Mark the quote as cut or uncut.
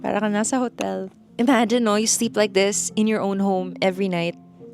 cut